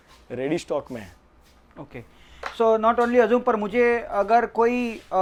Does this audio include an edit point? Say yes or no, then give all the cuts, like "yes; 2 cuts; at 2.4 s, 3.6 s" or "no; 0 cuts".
no; 0 cuts